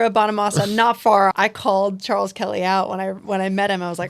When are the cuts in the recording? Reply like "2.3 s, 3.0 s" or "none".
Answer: 1.3 s